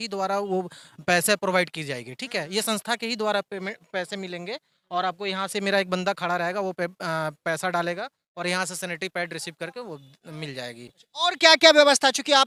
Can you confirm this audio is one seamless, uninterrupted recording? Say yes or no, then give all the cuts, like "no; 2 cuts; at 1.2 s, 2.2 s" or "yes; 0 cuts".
yes; 0 cuts